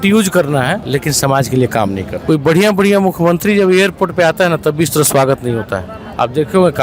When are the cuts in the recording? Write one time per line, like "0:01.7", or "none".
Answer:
0:00.8
0:02.1